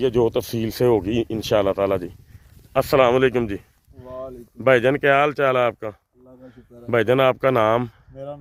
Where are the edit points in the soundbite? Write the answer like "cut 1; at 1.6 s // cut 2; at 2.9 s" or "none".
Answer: none